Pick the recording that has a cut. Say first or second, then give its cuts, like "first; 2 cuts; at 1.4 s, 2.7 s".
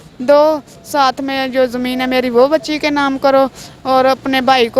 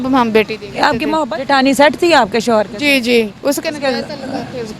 second; 1 cut; at 1.2 s